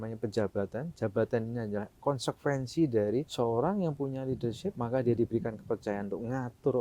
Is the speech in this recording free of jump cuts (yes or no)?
no